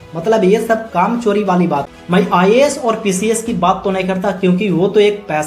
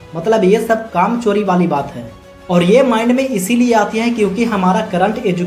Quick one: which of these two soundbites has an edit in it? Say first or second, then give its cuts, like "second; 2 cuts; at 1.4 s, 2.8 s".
first; 1 cut; at 1.9 s